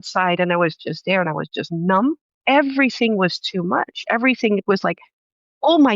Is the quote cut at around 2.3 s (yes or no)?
yes